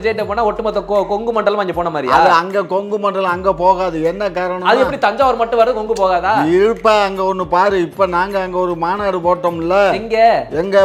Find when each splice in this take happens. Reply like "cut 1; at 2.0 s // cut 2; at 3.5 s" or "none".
none